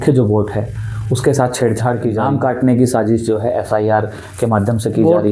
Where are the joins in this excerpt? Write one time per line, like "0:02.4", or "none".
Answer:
0:02.2